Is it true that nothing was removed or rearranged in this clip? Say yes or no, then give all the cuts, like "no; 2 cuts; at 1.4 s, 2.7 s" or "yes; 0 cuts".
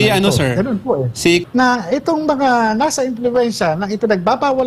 no; 1 cut; at 1.4 s